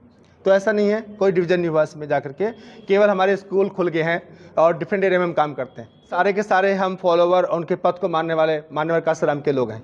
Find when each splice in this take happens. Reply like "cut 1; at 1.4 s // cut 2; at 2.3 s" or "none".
cut 1; at 6.2 s